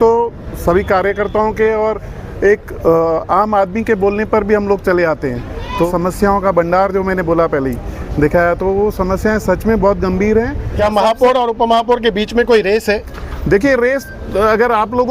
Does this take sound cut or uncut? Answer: cut